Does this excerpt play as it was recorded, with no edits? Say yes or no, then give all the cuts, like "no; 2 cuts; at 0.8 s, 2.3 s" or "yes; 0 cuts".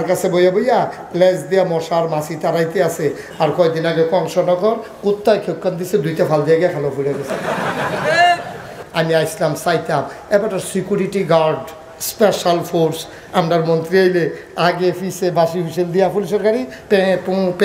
no; 1 cut; at 8.8 s